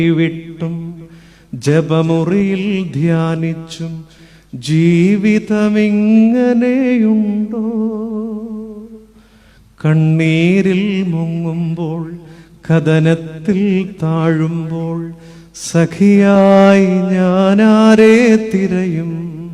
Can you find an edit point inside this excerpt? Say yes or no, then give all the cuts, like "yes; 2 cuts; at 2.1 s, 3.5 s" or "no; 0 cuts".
no; 0 cuts